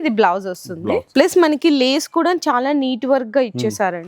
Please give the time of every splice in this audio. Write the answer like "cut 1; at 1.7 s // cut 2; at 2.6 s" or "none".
cut 1; at 1.1 s